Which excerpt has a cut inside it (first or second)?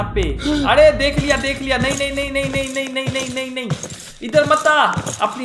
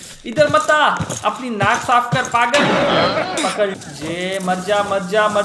second